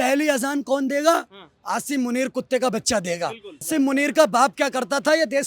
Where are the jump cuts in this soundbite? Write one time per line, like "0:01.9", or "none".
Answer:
0:03.7

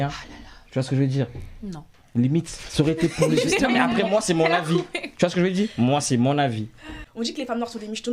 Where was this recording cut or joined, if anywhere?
0:07.0

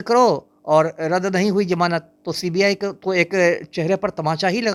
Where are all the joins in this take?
none

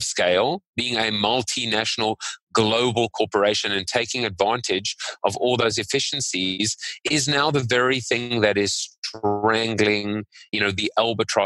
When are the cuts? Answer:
0:10.5

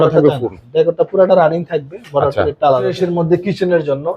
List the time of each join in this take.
0:03.0

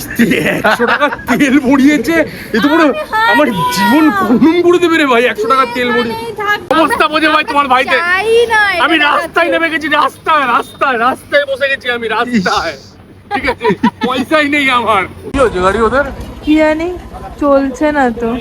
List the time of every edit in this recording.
0:06.7
0:15.2

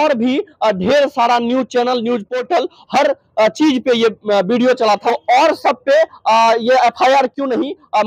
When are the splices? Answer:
0:02.8
0:05.0

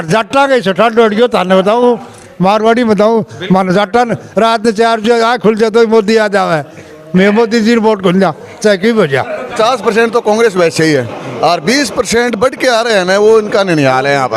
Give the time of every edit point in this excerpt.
0:09.5

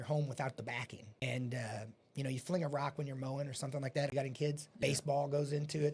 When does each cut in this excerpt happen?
0:01.2
0:04.4

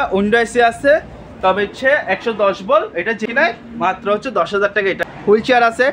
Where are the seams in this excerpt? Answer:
0:03.2
0:04.7

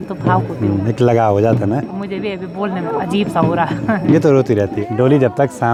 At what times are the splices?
none

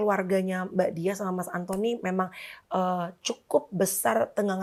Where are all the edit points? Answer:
none

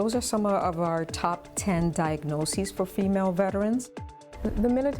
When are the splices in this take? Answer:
0:04.0

